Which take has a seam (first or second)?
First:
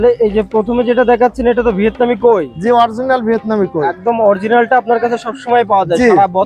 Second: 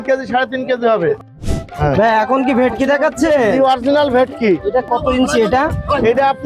second